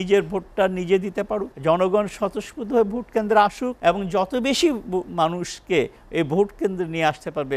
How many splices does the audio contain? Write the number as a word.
two